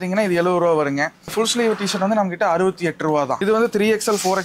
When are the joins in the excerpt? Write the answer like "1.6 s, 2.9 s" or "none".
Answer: 1.3 s, 3.4 s